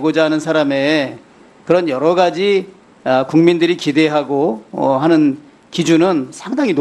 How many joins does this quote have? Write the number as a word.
zero